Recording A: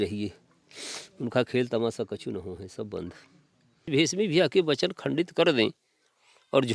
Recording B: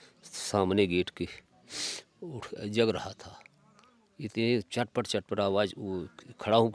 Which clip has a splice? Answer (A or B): A